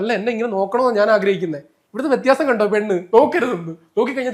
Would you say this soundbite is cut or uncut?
uncut